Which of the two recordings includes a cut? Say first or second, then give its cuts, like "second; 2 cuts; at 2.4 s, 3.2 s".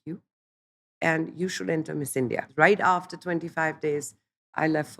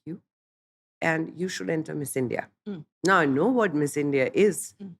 first; 1 cut; at 2.5 s